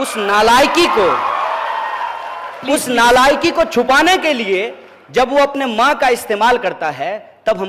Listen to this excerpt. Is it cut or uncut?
uncut